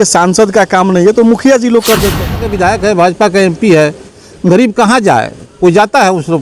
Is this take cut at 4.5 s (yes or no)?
no